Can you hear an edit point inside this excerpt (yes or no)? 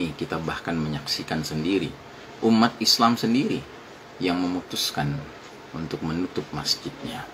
no